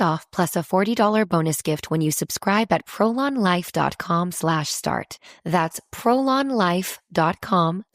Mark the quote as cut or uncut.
cut